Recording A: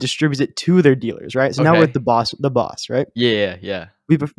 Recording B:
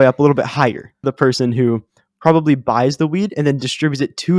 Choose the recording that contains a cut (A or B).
B